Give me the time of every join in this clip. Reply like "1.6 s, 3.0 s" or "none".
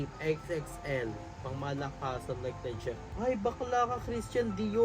3.1 s

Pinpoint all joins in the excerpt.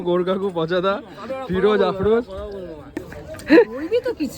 3.0 s

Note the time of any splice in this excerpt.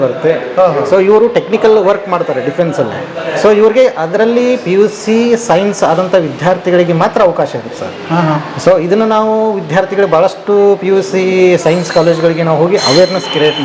none

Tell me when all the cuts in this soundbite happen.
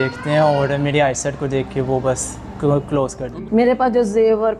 3.2 s

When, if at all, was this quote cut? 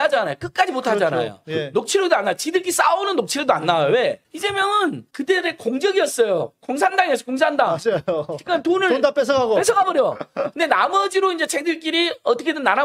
none

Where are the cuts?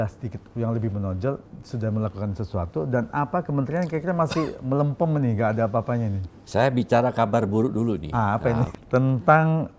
8.7 s

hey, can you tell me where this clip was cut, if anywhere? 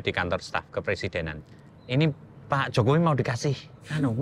1.4 s

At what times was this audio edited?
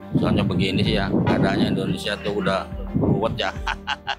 1.3 s

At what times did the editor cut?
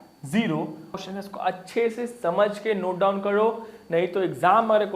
1.0 s

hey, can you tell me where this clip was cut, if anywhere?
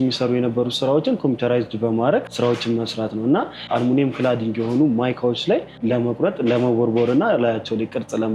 2.3 s, 3.7 s, 5.8 s

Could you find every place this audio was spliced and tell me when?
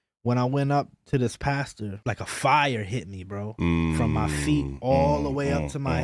2.0 s

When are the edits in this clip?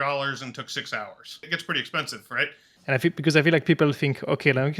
1.5 s, 2.7 s

